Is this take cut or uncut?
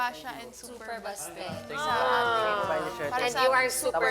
uncut